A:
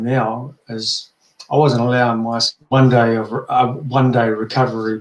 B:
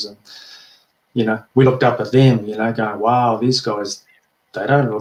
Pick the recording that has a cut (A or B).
A